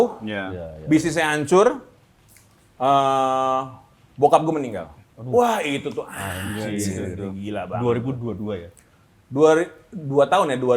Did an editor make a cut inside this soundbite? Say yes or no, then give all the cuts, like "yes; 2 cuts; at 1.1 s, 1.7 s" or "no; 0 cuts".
no; 0 cuts